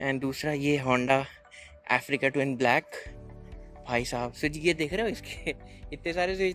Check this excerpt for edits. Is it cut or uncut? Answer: uncut